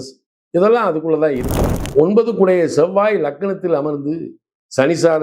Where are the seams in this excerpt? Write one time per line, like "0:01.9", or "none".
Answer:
0:01.8

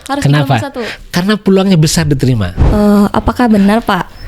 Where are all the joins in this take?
0:02.5

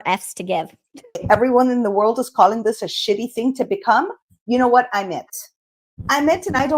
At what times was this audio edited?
0:01.2

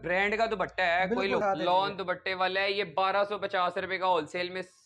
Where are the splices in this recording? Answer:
0:01.4

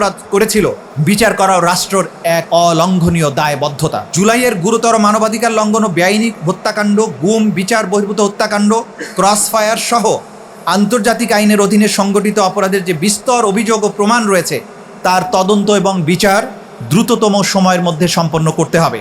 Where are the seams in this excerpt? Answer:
0:00.9
0:02.4
0:04.1

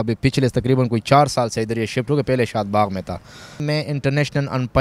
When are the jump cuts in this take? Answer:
0:03.6

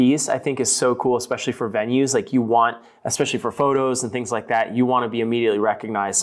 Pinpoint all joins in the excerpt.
none

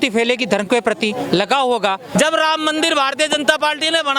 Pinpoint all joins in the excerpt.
0:02.0

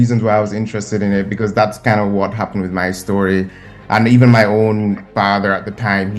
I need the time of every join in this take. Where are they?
0:03.6

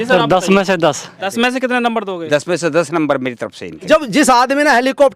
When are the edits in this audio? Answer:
0:01.1
0:03.7

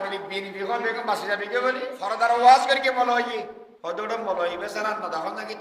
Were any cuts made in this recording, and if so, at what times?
0:02.0
0:03.6

